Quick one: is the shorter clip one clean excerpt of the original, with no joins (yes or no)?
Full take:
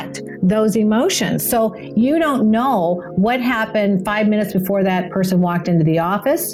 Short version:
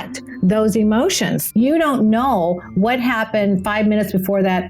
no